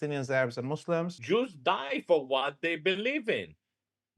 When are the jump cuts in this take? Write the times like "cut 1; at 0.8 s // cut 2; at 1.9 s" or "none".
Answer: cut 1; at 1.2 s